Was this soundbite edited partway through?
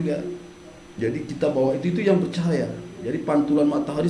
no; 0 cuts

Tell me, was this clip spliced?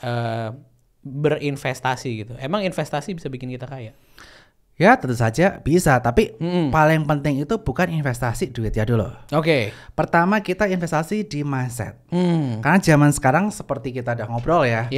no; 0 cuts

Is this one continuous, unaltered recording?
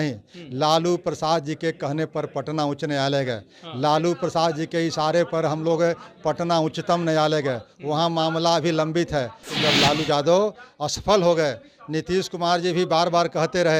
no; 1 cut; at 9.5 s

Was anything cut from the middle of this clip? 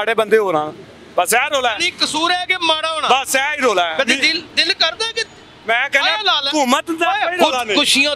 no; 0 cuts

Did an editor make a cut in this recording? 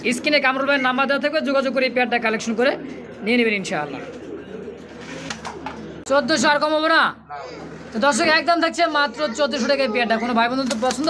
yes; 1 cut; at 6.0 s

